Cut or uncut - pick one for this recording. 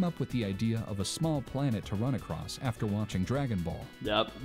uncut